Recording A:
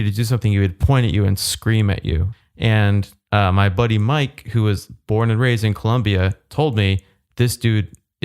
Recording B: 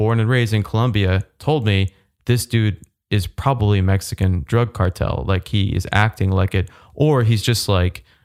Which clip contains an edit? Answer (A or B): A